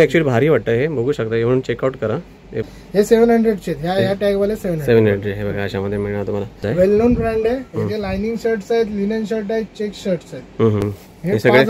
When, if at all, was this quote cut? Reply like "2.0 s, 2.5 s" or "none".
2.6 s, 6.8 s, 10.8 s